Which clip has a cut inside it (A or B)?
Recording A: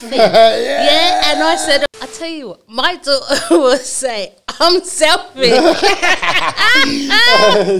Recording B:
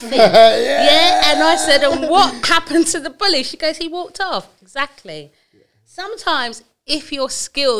A